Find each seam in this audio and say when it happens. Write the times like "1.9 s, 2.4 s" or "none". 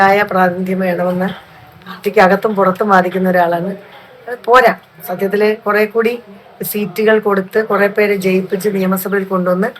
none